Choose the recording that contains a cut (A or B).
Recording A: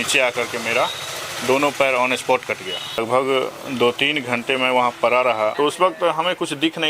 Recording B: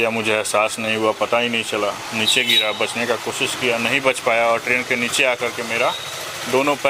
A